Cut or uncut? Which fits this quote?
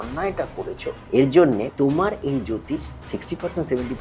cut